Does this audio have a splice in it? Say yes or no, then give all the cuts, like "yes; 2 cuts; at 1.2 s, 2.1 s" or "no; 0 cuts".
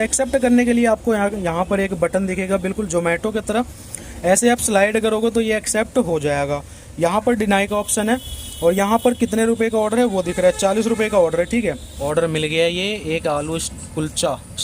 yes; 1 cut; at 11.9 s